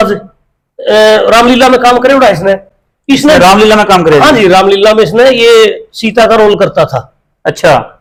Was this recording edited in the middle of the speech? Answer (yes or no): no